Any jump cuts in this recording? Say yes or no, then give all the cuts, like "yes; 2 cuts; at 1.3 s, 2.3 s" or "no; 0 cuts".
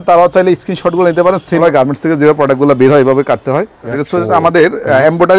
yes; 2 cuts; at 1.6 s, 4.0 s